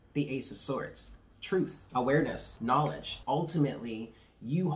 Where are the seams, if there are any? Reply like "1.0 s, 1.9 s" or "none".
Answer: 1.8 s, 3.0 s